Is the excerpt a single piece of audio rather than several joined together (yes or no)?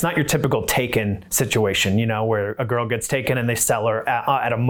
yes